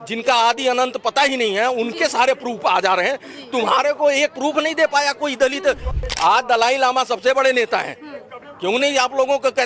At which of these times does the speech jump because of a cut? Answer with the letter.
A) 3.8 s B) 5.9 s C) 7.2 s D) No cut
B